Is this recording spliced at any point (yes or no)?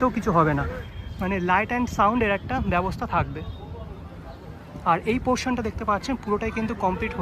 no